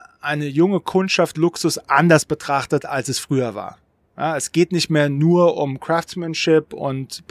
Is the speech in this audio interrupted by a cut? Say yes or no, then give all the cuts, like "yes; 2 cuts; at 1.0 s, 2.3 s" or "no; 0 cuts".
no; 0 cuts